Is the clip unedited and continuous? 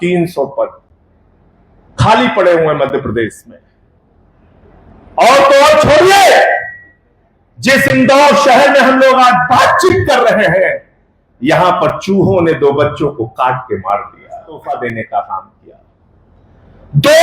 no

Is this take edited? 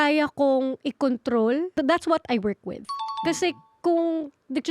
yes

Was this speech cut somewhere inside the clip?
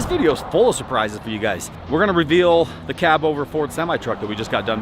yes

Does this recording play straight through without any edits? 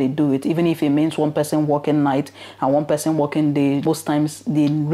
no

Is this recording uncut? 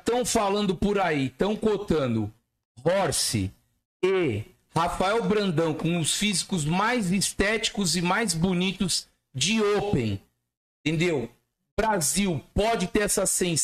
yes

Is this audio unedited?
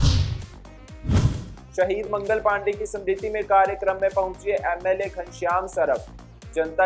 yes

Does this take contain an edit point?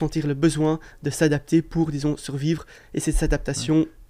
no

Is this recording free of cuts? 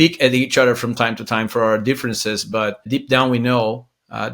no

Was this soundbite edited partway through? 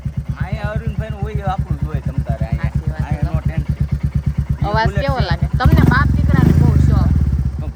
no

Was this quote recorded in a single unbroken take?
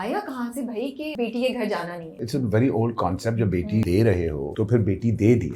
no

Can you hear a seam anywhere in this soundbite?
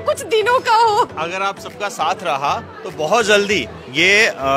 no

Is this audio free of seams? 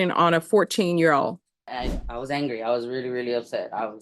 no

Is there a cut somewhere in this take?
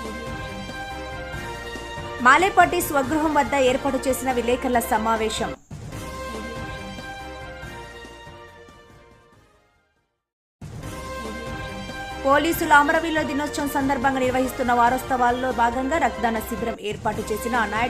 yes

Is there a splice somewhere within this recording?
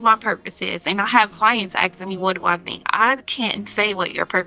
no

